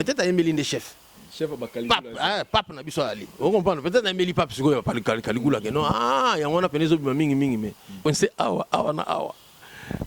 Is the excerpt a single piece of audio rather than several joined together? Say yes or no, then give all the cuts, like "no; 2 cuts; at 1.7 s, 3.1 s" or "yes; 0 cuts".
no; 1 cut; at 8.0 s